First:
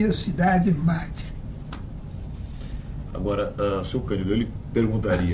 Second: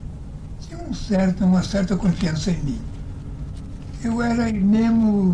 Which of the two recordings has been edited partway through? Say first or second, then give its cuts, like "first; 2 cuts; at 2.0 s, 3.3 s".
second; 1 cut; at 1.7 s